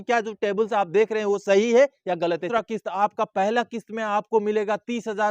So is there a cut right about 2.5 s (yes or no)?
yes